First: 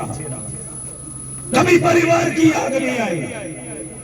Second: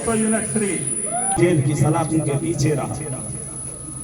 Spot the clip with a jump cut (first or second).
second